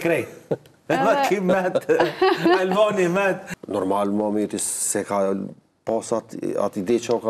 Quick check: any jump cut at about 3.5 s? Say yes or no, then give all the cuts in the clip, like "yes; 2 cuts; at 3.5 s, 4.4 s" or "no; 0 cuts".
yes; 1 cut; at 3.5 s